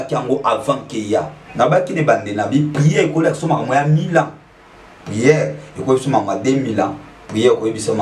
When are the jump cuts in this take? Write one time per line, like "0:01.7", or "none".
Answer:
none